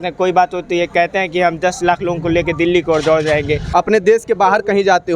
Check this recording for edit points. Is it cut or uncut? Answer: cut